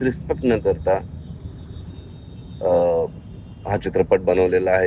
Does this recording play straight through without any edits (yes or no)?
yes